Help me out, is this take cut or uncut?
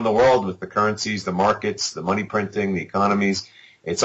uncut